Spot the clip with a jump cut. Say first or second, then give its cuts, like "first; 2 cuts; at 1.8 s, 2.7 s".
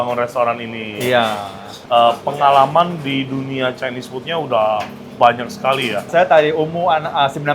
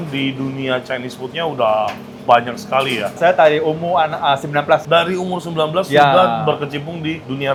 first; 1 cut; at 1.8 s